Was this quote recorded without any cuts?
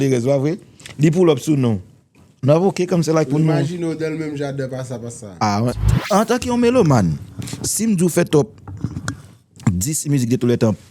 no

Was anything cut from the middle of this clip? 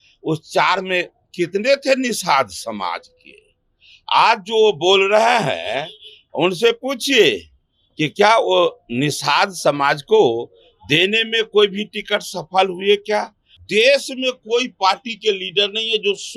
yes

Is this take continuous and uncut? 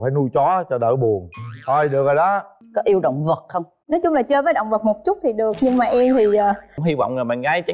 no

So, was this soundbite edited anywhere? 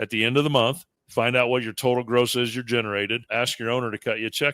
yes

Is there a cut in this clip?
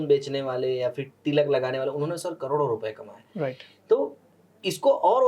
no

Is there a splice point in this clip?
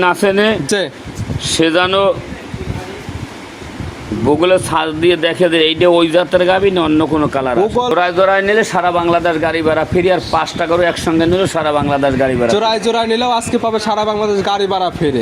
yes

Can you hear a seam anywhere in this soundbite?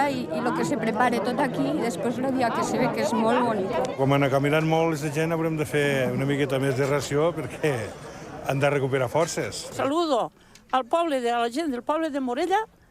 yes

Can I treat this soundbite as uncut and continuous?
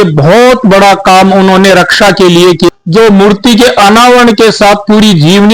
no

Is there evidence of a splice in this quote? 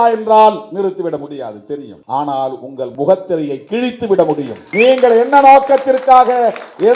yes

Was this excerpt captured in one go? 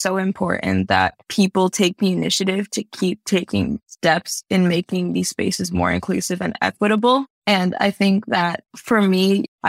yes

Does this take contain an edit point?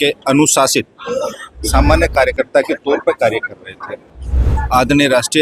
yes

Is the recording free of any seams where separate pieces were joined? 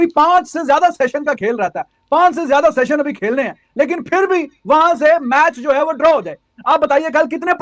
yes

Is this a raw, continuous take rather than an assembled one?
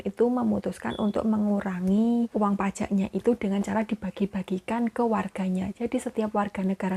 no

